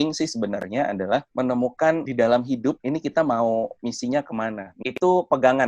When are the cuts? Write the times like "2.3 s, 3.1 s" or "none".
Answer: 1.3 s, 4.7 s